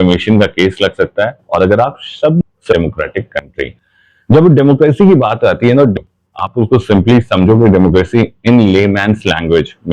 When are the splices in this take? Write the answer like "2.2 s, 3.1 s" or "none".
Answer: 2.4 s, 5.9 s